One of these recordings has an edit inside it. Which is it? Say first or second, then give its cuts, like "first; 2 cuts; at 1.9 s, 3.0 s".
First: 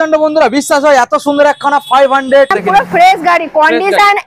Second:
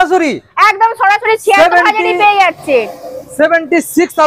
first; 1 cut; at 2.5 s